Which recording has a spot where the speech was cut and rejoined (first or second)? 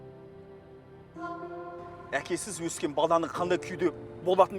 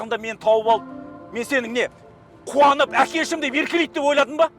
first